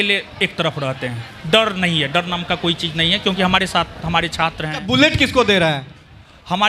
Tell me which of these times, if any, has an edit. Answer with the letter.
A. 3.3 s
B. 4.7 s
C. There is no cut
B